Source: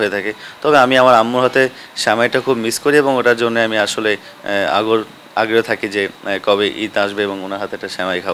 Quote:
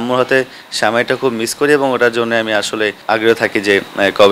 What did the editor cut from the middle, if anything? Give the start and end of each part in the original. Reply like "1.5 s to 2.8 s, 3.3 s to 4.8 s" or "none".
4.2 s to 5.3 s

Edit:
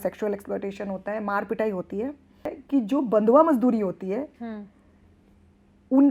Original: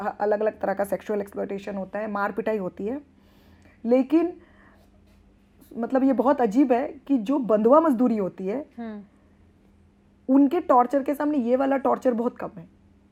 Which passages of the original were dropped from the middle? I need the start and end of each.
3.4 s to 6.9 s

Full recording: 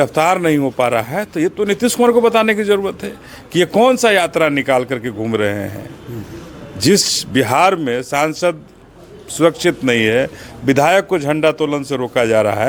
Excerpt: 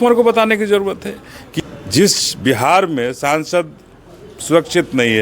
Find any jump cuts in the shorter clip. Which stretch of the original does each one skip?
3.4 s to 6.3 s

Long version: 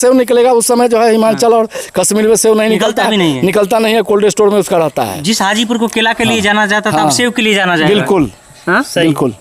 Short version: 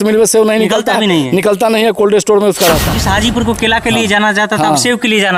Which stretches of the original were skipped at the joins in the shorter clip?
5.0 s to 5.3 s

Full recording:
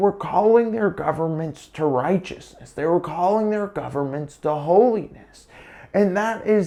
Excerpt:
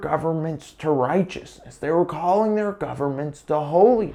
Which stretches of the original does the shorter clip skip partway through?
none

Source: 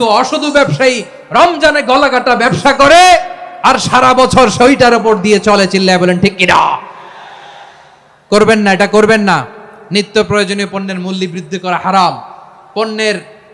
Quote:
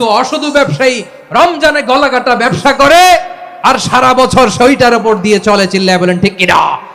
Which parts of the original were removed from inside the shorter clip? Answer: none

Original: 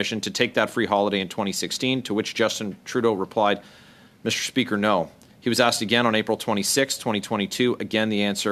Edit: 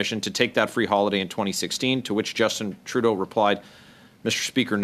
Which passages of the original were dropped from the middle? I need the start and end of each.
none

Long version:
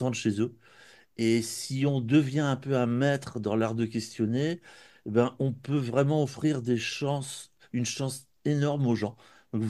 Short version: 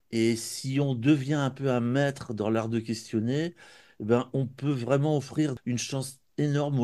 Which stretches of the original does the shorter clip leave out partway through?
6.6 s to 7.6 s

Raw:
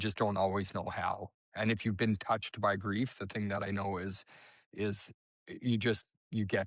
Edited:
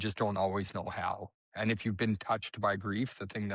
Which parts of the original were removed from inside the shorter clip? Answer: none

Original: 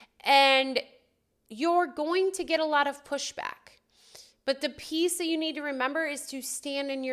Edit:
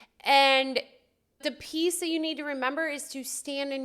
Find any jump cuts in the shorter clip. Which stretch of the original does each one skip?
1.5 s to 4.7 s

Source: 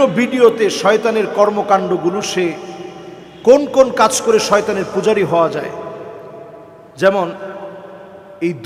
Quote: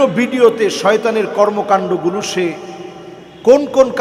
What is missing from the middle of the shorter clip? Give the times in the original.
none

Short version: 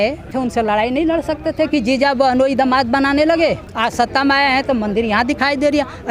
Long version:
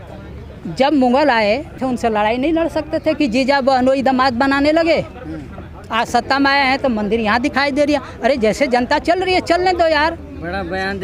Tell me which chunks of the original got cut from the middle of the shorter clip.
5.1 s to 5.8 s

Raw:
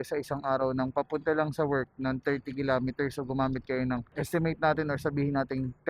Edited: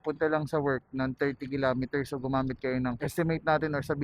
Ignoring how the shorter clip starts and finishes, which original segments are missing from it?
4.1 s to 4.2 s

